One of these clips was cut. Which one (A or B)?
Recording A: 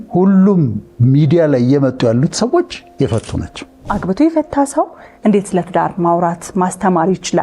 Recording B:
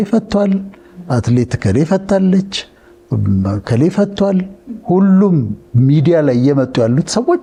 A